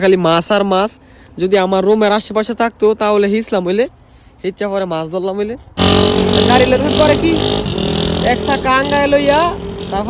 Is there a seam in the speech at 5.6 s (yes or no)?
yes